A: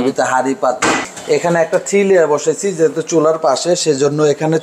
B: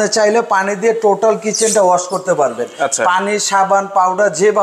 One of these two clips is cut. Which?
A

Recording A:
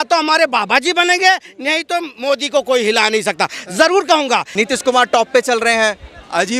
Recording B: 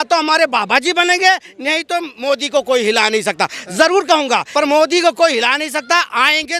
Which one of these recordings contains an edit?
A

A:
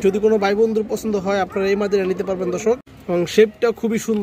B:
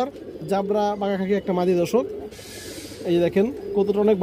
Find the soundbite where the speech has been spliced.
A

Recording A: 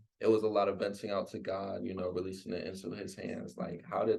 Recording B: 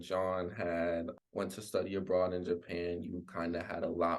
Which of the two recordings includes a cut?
B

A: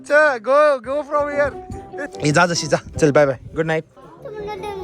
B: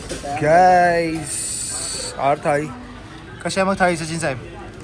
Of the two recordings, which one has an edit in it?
A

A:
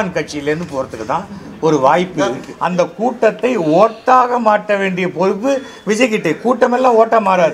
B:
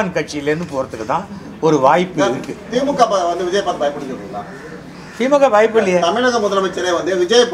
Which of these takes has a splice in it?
A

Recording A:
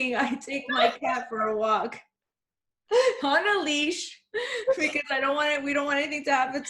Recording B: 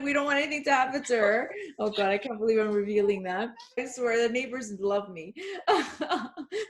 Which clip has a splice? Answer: B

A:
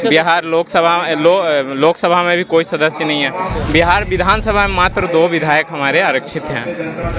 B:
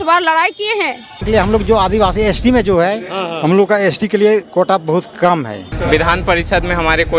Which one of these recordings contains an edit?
B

